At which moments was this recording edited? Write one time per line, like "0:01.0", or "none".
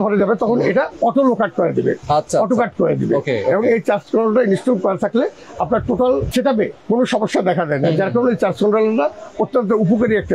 none